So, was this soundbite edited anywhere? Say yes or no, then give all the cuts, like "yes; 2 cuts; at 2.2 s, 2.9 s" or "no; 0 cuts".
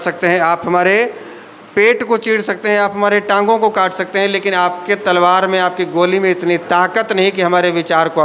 no; 0 cuts